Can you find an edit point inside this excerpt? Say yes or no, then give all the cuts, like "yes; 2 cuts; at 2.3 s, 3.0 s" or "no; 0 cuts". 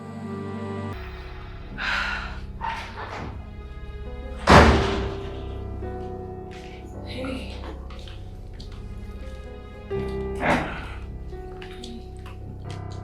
yes; 1 cut; at 0.9 s